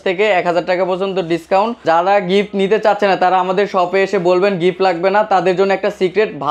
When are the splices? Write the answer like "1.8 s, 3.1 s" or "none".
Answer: 1.8 s